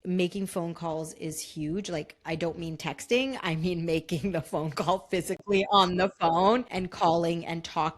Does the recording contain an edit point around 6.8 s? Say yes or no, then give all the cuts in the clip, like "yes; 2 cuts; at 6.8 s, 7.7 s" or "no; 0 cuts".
yes; 1 cut; at 6.8 s